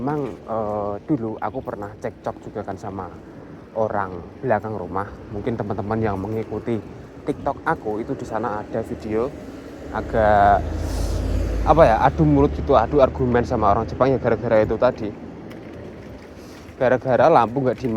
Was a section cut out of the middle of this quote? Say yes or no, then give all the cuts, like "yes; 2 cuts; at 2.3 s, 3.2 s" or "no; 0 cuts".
no; 0 cuts